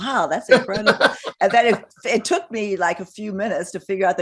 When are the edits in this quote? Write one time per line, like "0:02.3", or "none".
none